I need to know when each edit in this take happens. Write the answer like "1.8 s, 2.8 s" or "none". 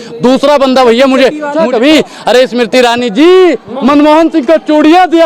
1.5 s